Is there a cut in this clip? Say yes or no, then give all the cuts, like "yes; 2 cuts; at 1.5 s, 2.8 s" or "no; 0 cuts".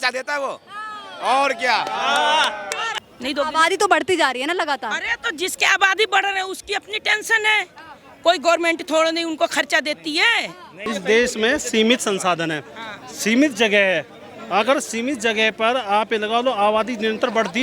yes; 2 cuts; at 2.9 s, 10.8 s